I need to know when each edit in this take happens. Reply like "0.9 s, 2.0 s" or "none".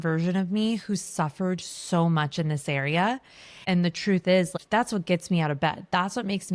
3.6 s, 4.6 s